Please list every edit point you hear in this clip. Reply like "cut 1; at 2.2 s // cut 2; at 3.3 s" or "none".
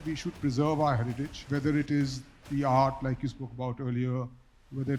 cut 1; at 1.4 s